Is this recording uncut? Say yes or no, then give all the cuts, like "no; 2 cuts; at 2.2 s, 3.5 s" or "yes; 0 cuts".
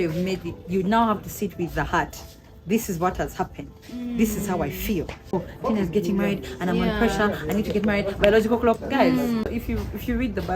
no; 2 cuts; at 5.3 s, 9.5 s